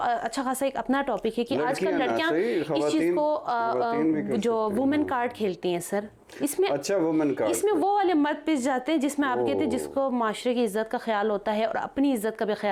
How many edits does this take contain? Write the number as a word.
zero